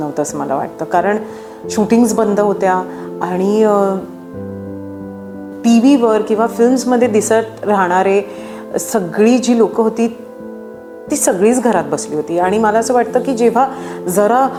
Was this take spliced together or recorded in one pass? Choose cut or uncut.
uncut